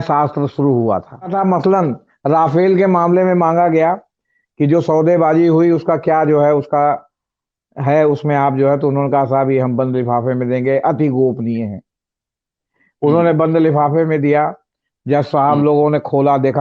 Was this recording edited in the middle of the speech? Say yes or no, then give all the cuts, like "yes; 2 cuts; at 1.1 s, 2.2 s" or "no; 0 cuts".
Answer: yes; 1 cut; at 1.3 s